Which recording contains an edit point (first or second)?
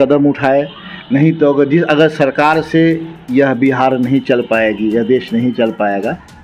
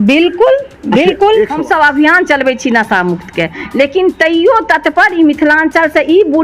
second